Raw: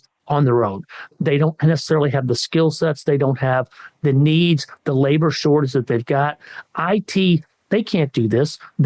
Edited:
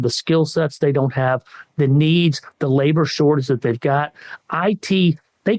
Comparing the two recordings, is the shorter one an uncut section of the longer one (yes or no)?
yes